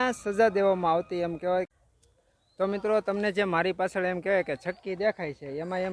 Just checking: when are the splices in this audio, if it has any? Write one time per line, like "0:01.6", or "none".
0:01.7

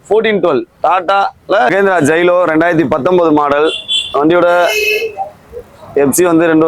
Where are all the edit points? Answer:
0:01.7

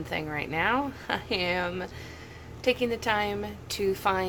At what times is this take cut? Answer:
none

